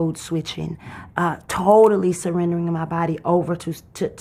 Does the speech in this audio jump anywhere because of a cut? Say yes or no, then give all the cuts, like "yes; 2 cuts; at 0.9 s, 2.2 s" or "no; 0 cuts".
no; 0 cuts